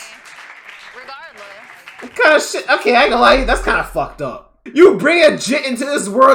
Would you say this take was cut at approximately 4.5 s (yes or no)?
yes